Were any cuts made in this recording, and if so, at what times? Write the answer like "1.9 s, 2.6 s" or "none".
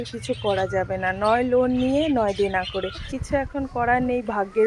3.1 s